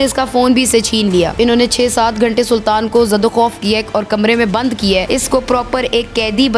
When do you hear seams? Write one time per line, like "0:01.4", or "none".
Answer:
0:01.3
0:05.1